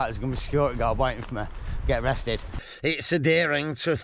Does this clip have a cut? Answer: yes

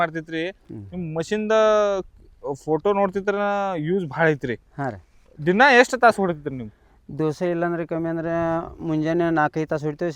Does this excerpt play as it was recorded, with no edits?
yes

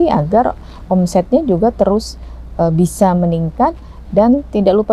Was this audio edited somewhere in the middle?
no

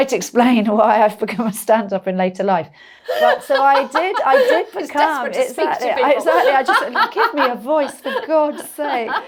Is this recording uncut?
yes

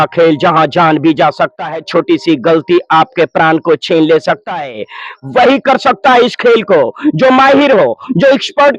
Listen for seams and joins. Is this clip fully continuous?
yes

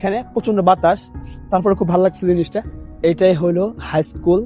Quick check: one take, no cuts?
yes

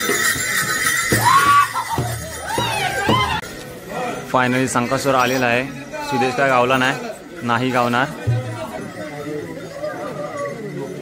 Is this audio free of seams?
no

